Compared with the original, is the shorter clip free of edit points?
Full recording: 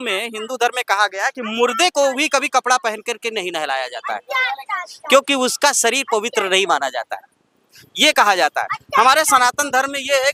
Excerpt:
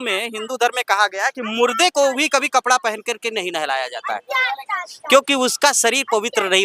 yes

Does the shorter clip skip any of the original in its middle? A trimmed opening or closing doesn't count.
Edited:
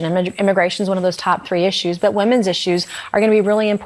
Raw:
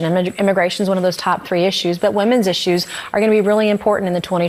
no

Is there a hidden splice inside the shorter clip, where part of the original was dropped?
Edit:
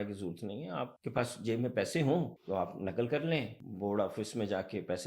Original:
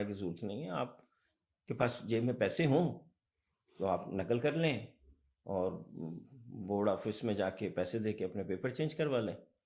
yes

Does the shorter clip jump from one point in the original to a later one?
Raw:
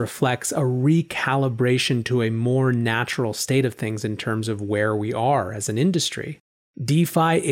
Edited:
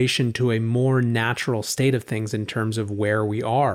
no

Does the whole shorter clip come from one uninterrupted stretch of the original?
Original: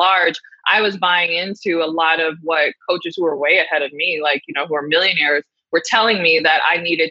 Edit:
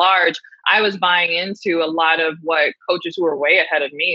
yes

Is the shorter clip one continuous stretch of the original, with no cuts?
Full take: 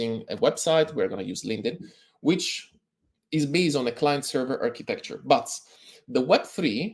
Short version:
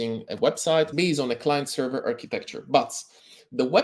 no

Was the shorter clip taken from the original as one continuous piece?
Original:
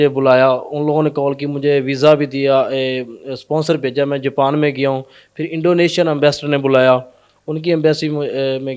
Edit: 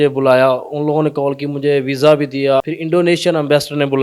no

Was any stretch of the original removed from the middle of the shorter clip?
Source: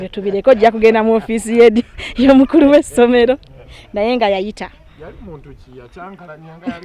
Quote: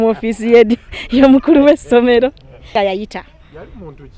yes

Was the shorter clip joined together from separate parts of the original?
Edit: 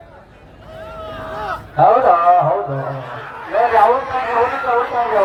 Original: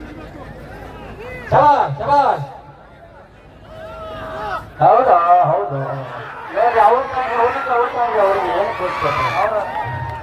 no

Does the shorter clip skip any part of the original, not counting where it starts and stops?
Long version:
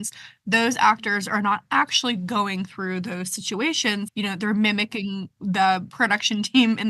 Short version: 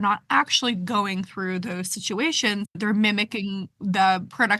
yes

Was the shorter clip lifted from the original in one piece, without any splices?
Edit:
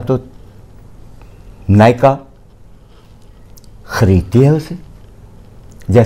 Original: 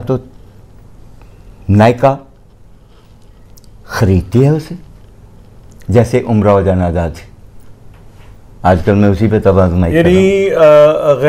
yes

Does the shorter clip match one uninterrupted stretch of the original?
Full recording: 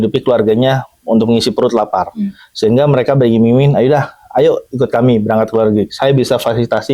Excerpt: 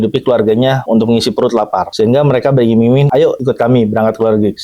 no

